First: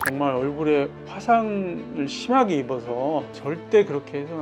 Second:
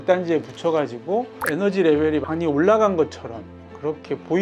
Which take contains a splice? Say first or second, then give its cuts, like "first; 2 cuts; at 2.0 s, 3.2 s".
first; 1 cut; at 3.3 s